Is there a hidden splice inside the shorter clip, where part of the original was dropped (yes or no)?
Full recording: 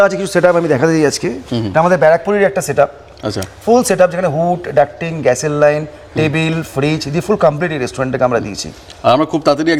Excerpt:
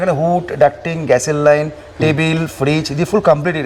no